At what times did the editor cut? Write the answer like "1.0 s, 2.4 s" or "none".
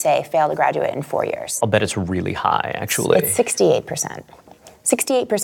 1.5 s